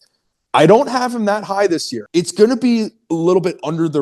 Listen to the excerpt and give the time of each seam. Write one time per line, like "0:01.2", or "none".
0:02.0